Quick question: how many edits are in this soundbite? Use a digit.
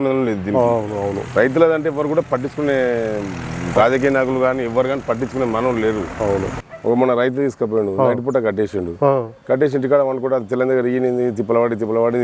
1